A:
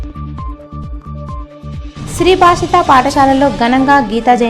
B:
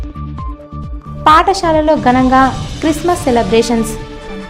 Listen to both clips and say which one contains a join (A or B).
B